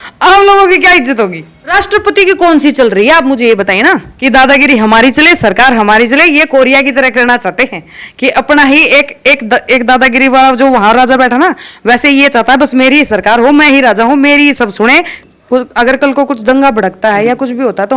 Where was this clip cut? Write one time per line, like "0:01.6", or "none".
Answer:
0:01.5
0:04.1
0:15.2